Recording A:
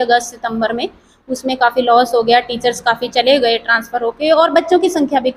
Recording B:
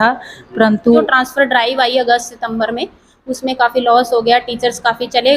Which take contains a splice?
B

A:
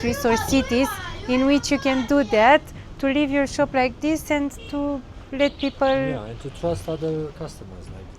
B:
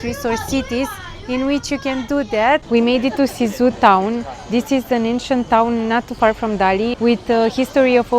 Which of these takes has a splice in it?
B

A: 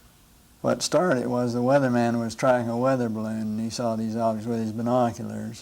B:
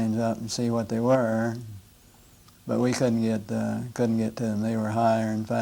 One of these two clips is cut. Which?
A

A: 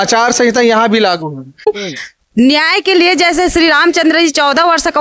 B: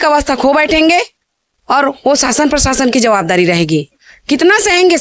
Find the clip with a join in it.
A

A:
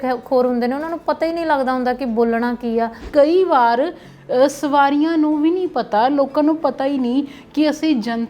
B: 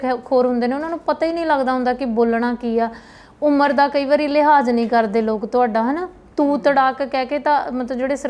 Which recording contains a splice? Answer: A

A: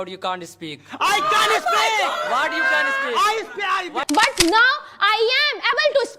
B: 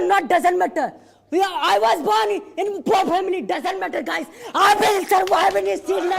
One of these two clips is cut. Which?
A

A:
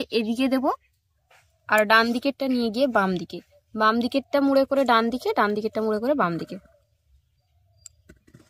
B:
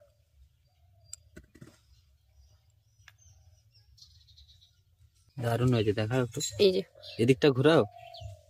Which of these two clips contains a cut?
B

